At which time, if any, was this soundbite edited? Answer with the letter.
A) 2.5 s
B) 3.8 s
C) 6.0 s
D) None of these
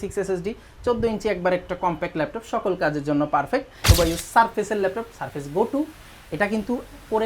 B